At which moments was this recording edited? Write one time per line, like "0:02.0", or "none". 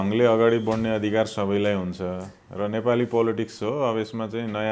none